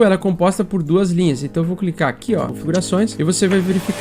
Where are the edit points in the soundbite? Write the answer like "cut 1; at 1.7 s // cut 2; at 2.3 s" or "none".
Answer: cut 1; at 2.9 s